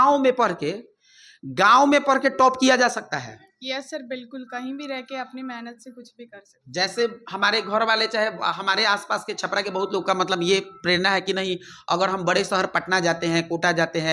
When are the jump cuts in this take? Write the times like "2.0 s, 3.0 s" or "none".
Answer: none

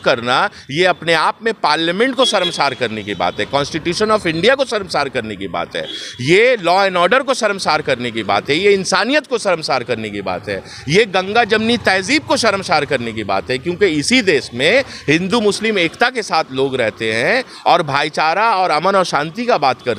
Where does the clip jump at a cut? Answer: none

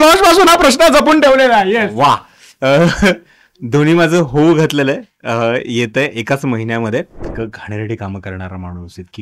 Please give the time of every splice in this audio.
7.2 s

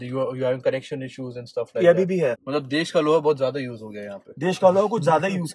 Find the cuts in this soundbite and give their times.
2.4 s

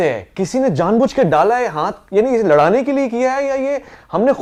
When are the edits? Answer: none

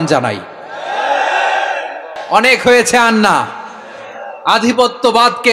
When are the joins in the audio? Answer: 2.2 s

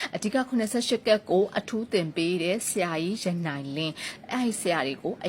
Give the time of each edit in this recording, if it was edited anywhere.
none

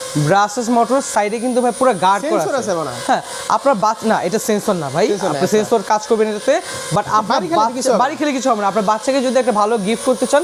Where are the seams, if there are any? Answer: none

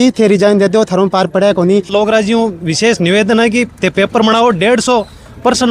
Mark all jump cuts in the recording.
1.9 s

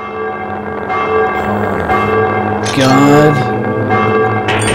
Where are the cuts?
none

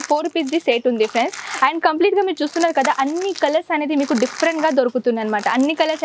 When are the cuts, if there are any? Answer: none

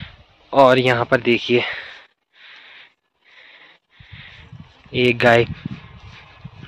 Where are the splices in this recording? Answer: none

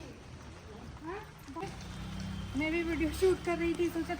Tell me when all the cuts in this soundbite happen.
1.6 s

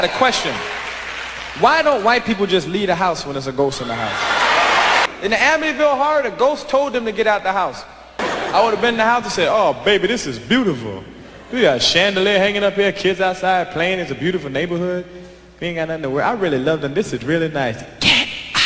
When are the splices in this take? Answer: 5.1 s

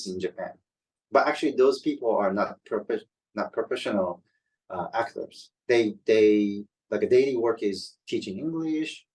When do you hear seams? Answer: none

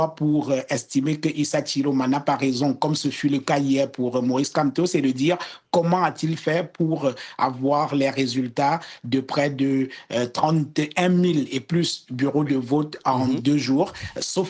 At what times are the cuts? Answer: none

